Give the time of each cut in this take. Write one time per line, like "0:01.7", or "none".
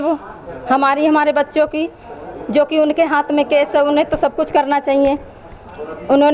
none